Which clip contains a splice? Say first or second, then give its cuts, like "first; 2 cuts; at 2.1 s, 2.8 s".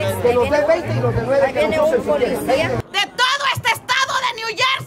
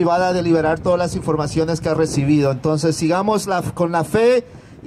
first; 1 cut; at 2.8 s